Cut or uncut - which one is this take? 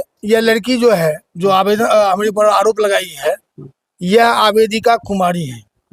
uncut